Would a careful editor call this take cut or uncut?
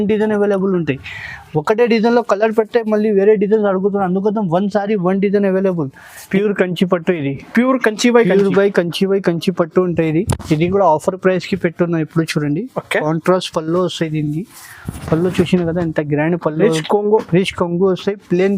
cut